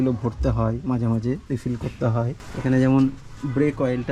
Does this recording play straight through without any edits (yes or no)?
no